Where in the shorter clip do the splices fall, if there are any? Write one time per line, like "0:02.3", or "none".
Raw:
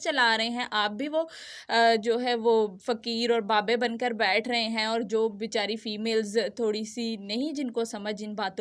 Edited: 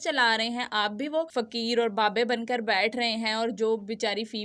0:01.4